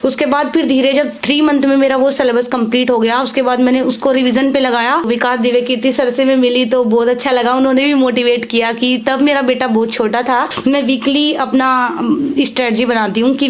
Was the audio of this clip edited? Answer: yes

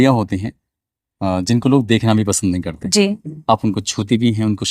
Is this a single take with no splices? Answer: no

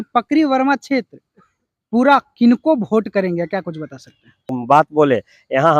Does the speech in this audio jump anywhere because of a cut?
yes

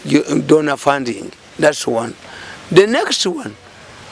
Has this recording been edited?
no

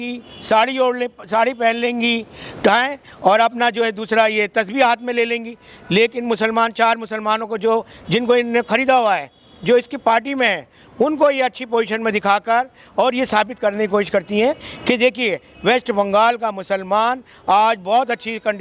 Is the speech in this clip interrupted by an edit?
no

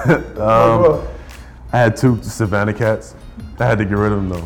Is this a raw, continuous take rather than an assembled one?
no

